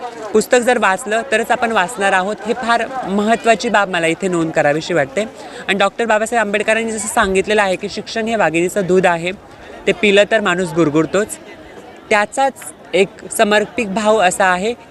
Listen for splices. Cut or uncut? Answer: uncut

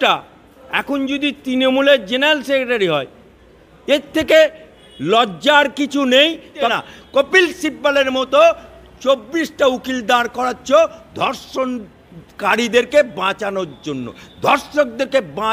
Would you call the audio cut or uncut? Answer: cut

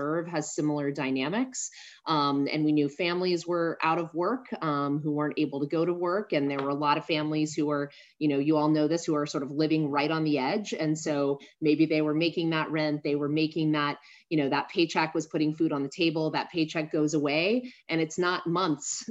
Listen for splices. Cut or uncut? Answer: uncut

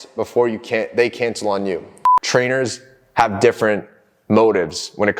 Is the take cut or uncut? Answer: cut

